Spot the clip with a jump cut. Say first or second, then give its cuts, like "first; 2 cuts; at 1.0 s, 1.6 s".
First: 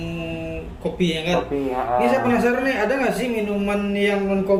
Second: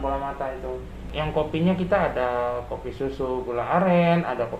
second; 1 cut; at 1.2 s